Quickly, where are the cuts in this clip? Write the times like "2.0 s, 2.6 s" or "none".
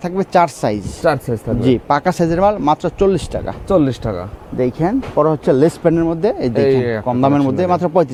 none

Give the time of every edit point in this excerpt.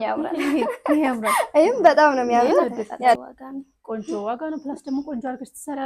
3.2 s

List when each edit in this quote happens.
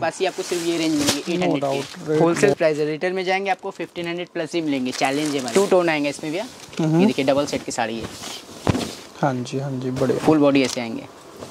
2.2 s, 5.5 s, 10.3 s

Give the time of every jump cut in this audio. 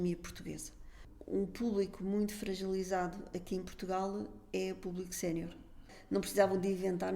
1.0 s, 5.9 s

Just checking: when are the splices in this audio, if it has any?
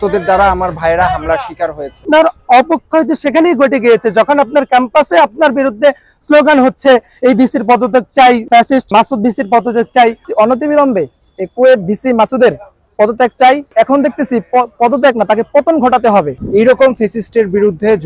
2.0 s, 10.2 s, 16.4 s

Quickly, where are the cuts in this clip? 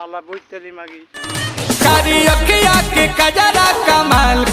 1.2 s

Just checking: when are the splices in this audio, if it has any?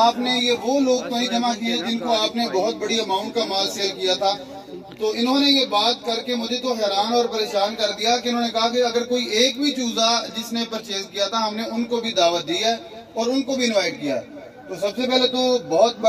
none

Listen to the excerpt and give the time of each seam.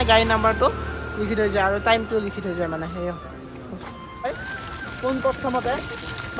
4.3 s

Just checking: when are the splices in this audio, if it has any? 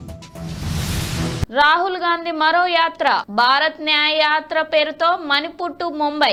none

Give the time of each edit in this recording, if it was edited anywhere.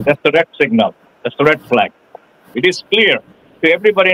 2.4 s

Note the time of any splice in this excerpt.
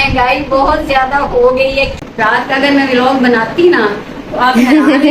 2.0 s

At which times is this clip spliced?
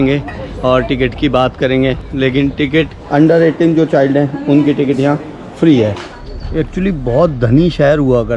3.0 s, 6.1 s

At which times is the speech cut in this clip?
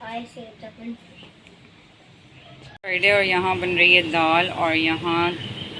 2.8 s

